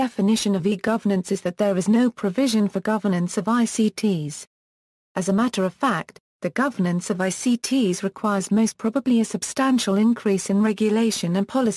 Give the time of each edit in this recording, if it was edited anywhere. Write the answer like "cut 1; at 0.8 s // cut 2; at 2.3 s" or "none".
cut 1; at 1.7 s